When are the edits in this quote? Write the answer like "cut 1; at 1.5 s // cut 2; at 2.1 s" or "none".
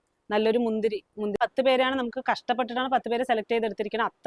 cut 1; at 1.4 s